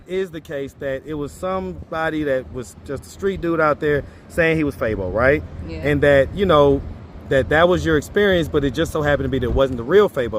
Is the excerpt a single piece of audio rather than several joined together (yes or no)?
yes